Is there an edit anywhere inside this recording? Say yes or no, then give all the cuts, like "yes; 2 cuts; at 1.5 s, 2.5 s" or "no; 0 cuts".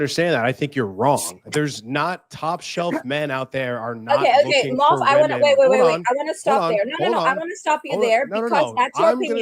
yes; 1 cut; at 1.4 s